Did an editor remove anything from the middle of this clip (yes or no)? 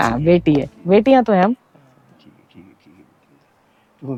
no